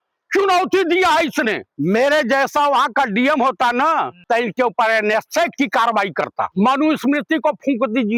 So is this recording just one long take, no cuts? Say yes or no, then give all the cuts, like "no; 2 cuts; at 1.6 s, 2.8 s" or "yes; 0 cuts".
no; 2 cuts; at 1.7 s, 6.5 s